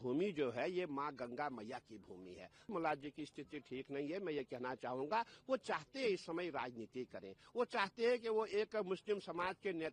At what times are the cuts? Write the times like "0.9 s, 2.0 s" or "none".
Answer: 2.7 s